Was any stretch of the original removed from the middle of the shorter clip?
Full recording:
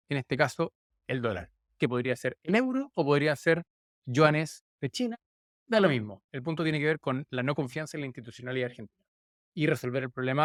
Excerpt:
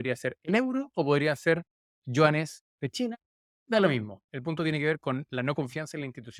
no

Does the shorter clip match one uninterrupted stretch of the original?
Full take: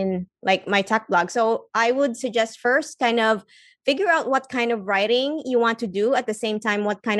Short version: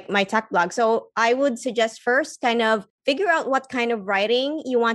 no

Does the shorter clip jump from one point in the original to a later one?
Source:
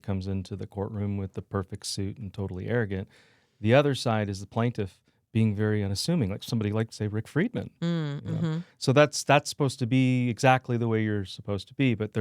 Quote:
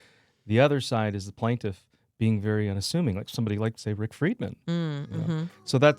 no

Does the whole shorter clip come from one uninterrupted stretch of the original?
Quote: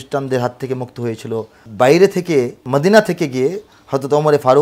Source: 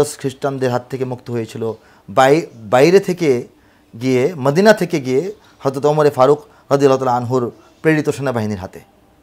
no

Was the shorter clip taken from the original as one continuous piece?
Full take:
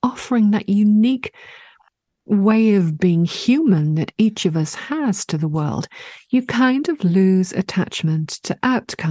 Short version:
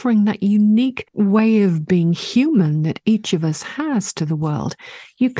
no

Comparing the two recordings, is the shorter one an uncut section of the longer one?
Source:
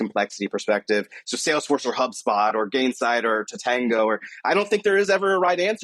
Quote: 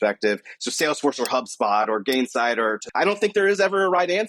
no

